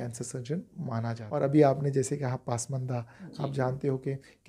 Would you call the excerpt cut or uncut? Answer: cut